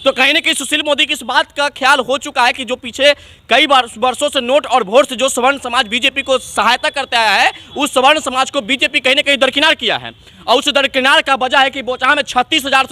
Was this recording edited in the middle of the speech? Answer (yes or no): no